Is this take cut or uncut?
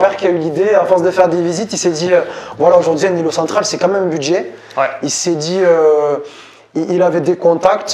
uncut